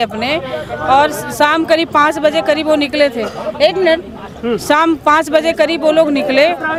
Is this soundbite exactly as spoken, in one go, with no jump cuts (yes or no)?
yes